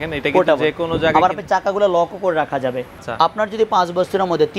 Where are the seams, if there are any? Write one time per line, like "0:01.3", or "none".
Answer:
0:03.0